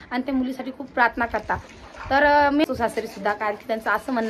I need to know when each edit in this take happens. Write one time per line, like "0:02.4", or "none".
0:02.6